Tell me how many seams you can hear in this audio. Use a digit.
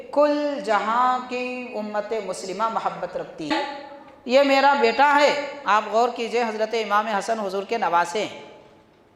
1